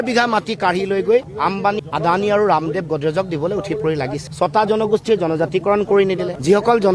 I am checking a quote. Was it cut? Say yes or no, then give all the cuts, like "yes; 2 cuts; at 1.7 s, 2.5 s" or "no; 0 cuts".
no; 0 cuts